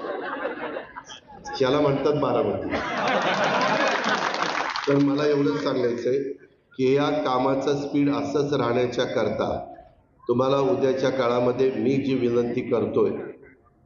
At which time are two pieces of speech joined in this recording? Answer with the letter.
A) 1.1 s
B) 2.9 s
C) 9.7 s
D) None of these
D